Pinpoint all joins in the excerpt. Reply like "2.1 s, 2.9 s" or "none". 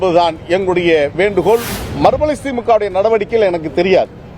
1.8 s